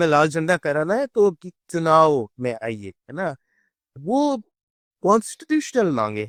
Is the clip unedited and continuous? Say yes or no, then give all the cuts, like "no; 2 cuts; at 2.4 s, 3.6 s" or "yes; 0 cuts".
yes; 0 cuts